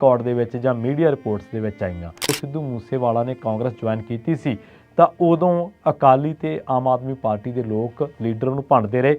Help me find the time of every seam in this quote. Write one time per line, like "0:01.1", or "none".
0:02.3